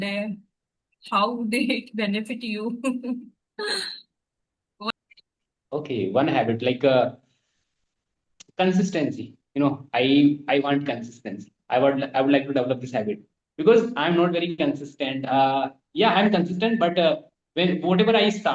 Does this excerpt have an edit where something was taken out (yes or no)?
no